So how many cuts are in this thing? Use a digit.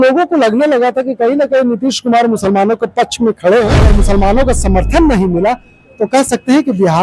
1